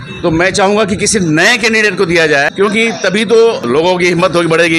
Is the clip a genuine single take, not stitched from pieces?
no; 2 cuts; at 2.5 s, 3.6 s

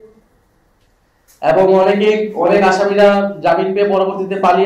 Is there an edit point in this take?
no; 0 cuts

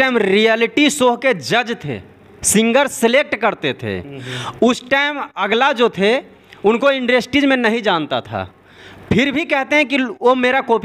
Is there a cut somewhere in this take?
no; 0 cuts

